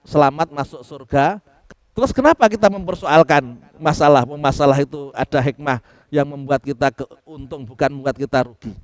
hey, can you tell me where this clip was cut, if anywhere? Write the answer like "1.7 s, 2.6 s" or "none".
1.5 s